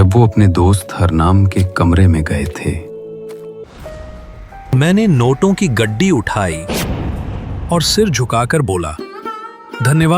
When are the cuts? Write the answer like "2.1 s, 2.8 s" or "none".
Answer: 3.6 s